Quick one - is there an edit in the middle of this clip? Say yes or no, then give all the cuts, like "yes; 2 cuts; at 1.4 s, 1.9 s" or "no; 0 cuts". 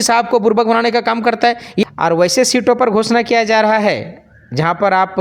yes; 1 cut; at 1.8 s